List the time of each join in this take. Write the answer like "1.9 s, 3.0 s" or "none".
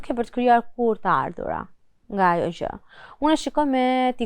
none